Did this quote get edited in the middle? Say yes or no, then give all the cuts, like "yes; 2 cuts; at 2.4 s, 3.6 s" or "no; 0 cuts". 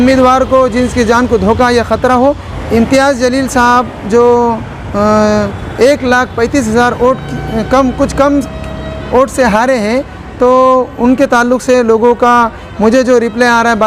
yes; 1 cut; at 2.5 s